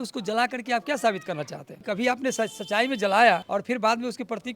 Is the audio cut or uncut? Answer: cut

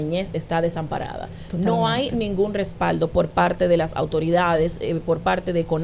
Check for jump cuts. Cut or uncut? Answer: uncut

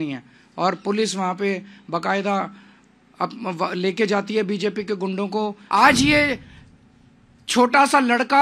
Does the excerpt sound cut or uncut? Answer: cut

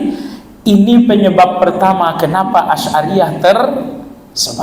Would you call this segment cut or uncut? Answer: uncut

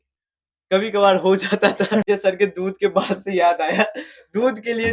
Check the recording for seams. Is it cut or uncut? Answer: cut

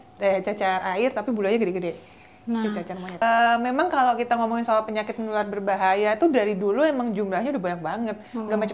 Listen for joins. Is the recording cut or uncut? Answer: cut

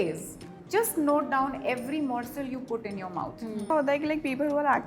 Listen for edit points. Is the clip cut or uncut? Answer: cut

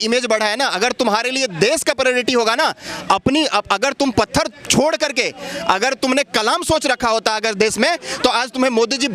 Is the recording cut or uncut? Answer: uncut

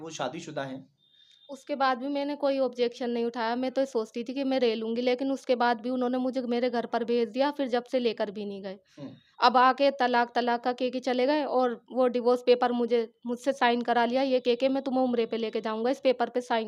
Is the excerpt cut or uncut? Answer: uncut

